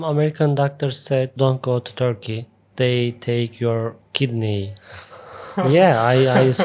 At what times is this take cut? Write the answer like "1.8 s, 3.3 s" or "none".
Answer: 1.3 s, 2.6 s